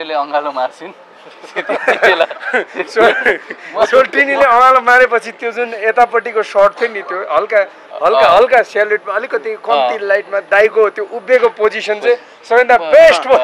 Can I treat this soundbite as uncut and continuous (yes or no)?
yes